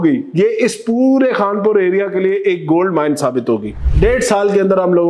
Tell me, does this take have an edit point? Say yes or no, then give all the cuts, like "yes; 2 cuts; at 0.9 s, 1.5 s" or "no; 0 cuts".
yes; 1 cut; at 3.8 s